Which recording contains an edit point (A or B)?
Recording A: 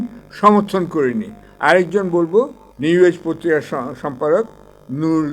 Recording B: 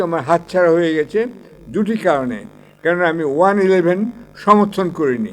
A